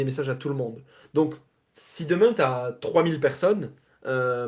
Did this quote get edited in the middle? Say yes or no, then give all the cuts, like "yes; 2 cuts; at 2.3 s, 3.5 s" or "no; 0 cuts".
no; 0 cuts